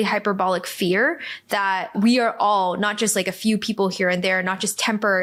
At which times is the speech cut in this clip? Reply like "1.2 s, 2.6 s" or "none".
none